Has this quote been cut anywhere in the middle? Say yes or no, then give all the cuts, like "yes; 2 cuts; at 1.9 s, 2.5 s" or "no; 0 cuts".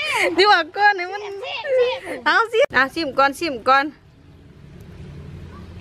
yes; 1 cut; at 2.7 s